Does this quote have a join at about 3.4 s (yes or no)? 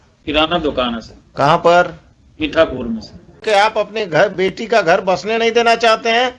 yes